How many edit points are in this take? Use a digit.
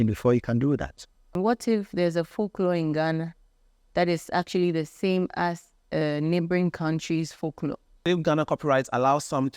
2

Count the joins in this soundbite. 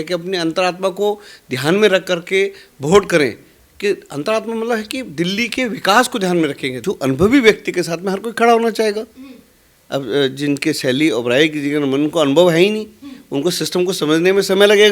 1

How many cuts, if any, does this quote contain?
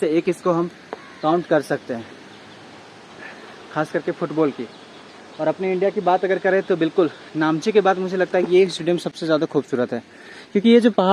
0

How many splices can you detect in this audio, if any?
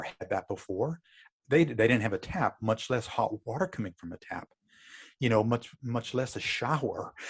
0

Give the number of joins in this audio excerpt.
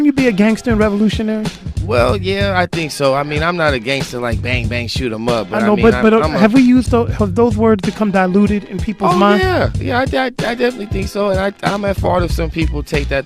1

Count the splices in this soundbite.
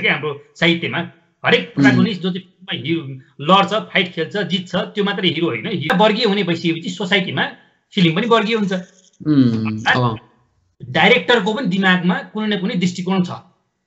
1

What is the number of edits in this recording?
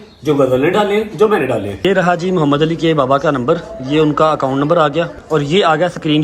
2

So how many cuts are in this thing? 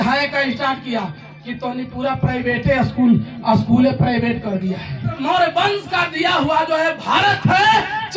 1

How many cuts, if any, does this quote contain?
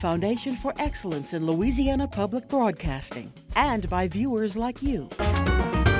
1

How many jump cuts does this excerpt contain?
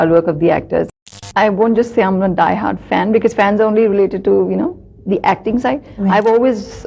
1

